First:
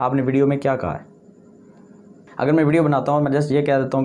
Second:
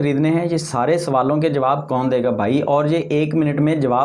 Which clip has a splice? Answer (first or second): first